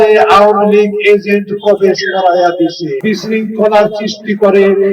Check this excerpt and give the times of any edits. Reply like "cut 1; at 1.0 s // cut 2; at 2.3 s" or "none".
cut 1; at 2.9 s